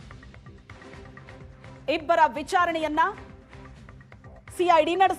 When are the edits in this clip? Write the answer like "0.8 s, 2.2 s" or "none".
1.3 s